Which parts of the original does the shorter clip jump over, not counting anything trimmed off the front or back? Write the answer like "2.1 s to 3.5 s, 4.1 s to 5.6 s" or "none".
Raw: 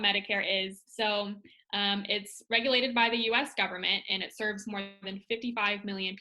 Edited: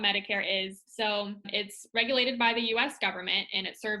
1.5 s to 2.1 s